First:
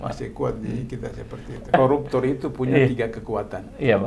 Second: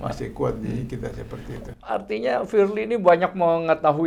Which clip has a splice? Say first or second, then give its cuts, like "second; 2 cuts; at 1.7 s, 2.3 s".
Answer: first; 1 cut; at 1.7 s